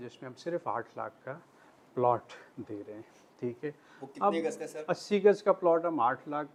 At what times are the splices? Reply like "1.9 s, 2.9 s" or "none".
none